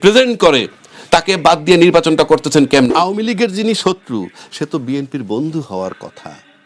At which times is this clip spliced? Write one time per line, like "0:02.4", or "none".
0:02.9